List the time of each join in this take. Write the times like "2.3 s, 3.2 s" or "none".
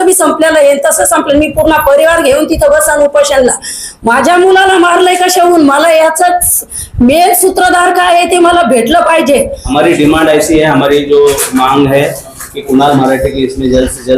9.6 s